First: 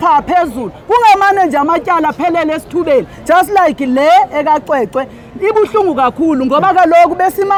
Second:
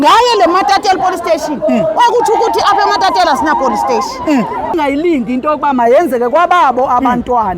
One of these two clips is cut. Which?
second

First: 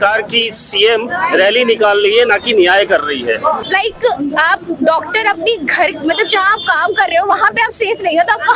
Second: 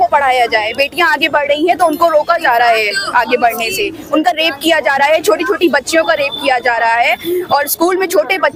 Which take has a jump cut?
first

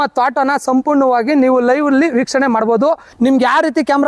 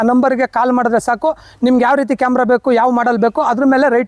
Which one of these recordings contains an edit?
first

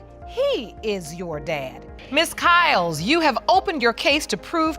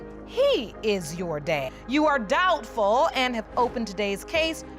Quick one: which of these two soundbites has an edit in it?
first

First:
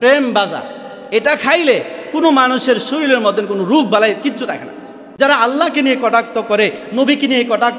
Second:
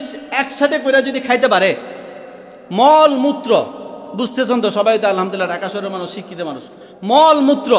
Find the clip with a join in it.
first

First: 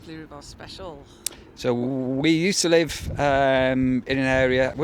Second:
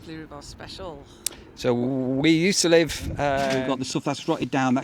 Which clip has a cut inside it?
second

